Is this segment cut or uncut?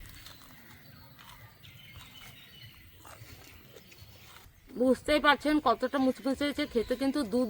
cut